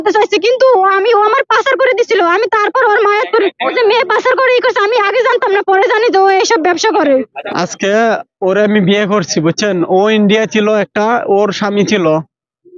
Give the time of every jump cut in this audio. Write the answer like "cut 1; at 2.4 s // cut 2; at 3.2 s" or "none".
cut 1; at 3.7 s // cut 2; at 7.4 s